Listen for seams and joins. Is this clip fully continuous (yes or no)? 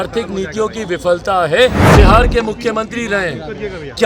no